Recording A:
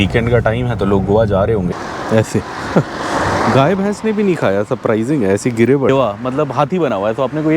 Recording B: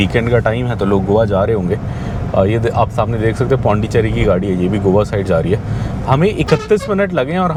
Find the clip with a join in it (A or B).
A